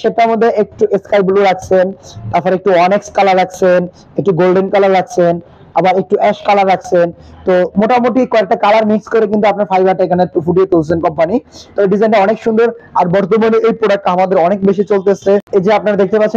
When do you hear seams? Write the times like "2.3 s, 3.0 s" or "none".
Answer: 15.5 s